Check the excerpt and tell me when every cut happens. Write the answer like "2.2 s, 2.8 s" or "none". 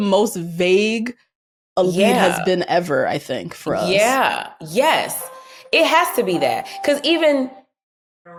none